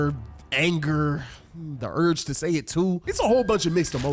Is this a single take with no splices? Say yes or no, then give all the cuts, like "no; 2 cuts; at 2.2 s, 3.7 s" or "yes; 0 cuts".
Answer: no; 1 cut; at 3.1 s